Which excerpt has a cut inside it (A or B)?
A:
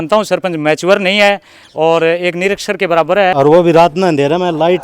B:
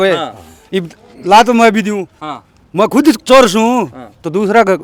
A